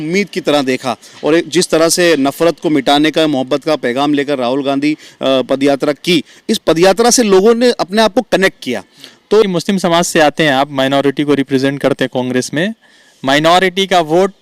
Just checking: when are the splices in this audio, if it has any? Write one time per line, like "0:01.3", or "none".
0:09.4

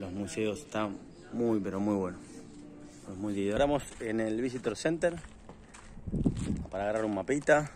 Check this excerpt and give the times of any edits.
0:03.6

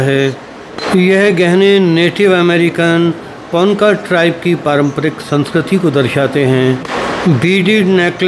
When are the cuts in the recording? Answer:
none

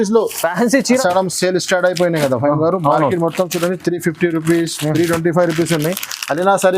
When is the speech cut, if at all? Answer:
0:01.0

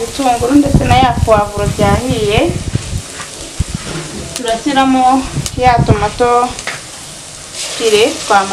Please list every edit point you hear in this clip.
none

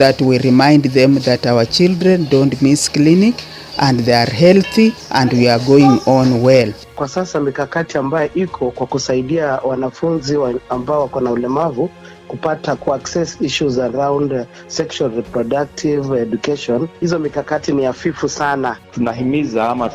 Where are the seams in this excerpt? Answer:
0:05.0
0:07.0
0:16.9
0:18.8

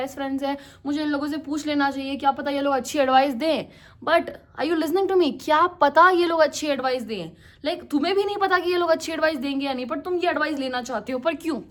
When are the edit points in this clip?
none

